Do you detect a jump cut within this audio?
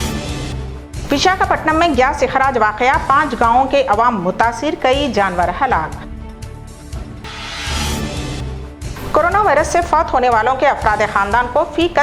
yes; 1 cut; at 0.9 s

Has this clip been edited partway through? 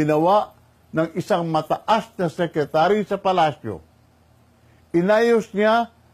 no; 0 cuts

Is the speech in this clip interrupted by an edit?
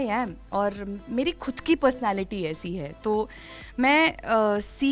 no; 0 cuts

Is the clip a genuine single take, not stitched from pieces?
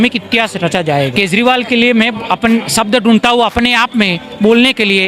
no; 1 cut; at 1.1 s

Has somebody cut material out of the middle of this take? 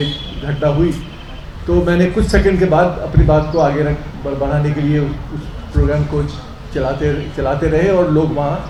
no; 0 cuts

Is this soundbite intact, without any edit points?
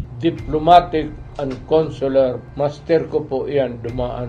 no; 2 cuts; at 1.2 s, 2.4 s

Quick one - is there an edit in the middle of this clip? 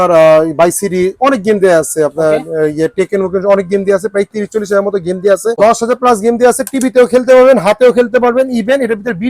yes; 1 cut; at 5.6 s

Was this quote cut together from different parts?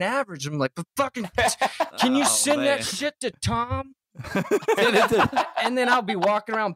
no; 0 cuts

